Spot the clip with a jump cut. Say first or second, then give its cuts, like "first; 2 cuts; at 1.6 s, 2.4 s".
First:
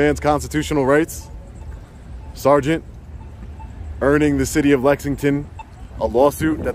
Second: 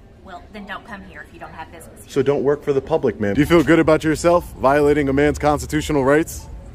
second; 1 cut; at 3.3 s